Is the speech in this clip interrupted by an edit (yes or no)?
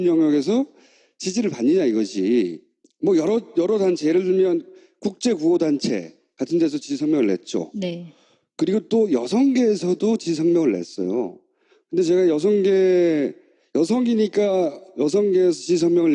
no